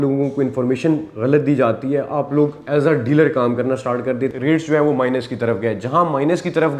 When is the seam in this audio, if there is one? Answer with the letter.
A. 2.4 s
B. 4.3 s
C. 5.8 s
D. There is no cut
B